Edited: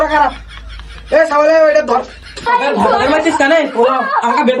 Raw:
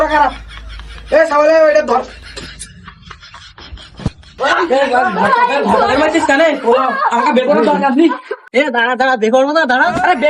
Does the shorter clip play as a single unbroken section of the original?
no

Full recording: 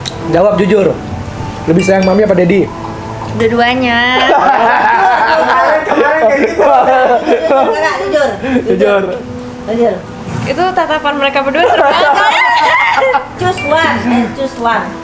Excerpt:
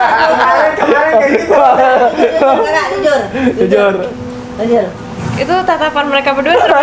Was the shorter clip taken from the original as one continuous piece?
yes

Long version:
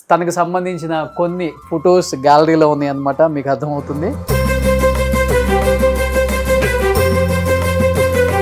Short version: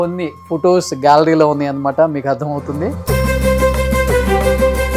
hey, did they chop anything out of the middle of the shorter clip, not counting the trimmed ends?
no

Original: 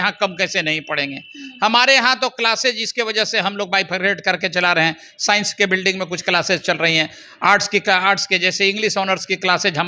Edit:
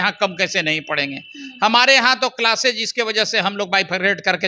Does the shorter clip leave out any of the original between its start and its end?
no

